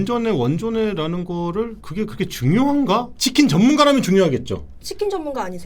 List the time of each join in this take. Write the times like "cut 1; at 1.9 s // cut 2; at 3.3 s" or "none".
cut 1; at 3.1 s